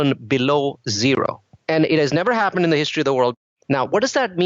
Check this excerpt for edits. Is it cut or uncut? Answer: cut